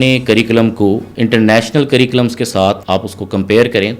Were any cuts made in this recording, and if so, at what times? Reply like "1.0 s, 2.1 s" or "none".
1.1 s, 2.8 s